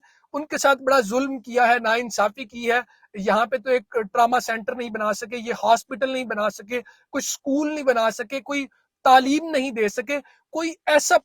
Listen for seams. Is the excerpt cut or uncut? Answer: uncut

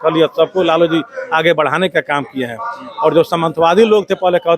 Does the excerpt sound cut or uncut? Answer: uncut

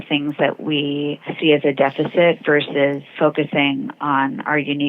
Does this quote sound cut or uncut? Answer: cut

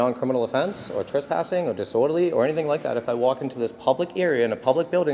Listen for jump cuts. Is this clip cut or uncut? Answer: uncut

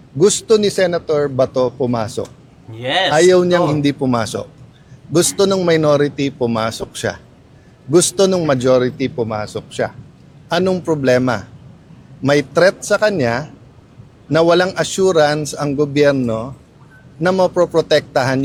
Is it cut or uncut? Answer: uncut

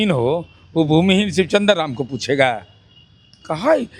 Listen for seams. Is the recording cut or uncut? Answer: uncut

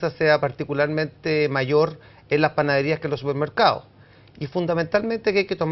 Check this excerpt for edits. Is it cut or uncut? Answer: uncut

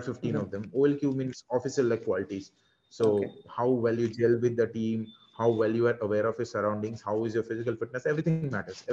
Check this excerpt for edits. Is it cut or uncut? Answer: uncut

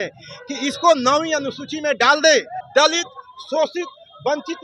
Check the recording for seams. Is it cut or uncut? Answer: cut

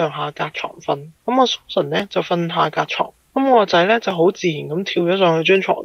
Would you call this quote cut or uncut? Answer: uncut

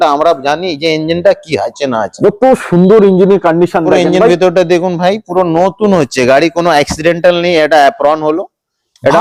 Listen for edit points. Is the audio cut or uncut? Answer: uncut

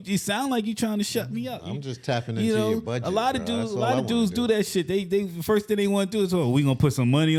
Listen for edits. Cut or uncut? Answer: uncut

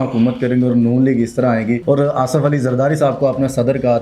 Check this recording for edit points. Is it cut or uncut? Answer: cut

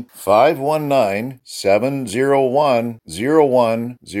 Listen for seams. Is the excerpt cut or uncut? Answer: uncut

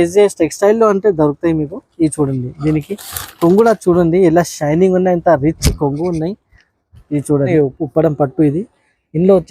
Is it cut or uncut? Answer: cut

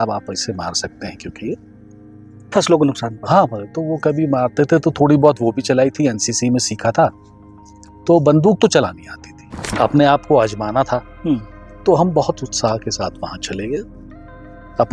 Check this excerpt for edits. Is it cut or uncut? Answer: cut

